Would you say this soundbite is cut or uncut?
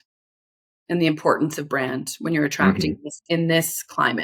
uncut